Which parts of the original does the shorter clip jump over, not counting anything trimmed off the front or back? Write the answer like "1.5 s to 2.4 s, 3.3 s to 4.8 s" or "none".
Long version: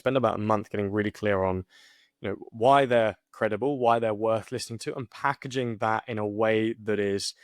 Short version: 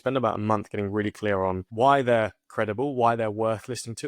1.7 s to 2.5 s